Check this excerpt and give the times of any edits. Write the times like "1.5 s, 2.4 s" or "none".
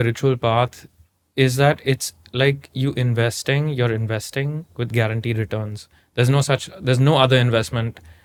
none